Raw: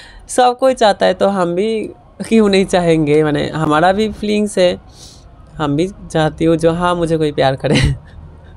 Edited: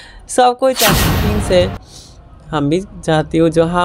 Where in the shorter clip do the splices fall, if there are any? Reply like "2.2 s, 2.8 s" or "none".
1.0 s